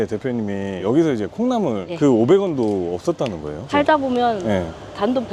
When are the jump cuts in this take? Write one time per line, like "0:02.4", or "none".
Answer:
none